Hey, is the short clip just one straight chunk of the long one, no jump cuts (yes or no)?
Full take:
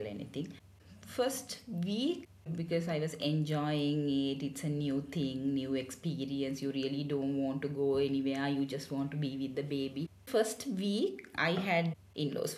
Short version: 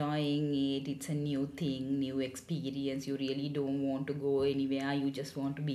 yes